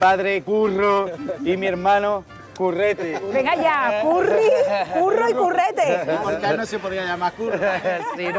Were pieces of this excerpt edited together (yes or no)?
no